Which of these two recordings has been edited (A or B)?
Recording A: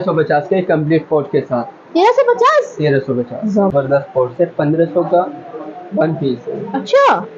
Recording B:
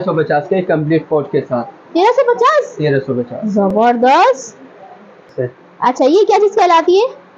A